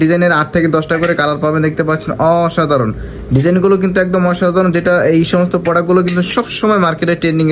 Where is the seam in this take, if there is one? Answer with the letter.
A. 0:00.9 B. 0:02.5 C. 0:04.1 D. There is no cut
D